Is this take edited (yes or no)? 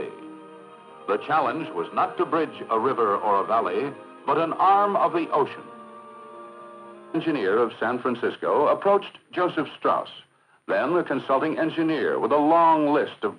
no